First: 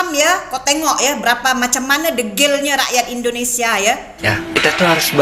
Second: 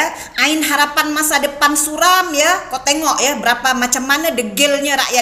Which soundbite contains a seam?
first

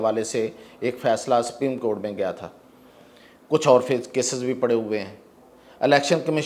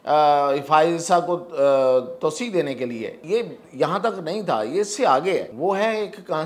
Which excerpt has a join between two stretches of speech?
second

